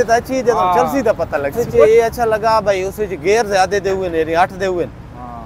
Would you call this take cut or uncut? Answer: cut